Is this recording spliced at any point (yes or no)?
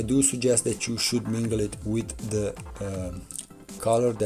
no